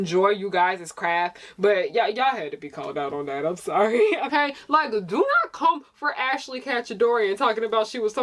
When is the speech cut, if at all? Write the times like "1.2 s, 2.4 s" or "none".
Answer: 4.3 s

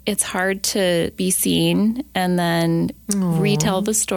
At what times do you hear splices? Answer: 1.1 s

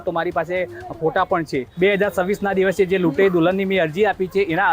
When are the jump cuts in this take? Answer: 1.6 s

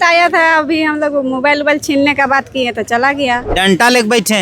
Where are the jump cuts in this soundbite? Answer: 3.5 s

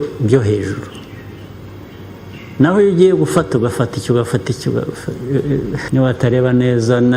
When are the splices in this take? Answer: 5.8 s

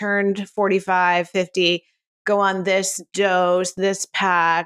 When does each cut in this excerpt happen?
none

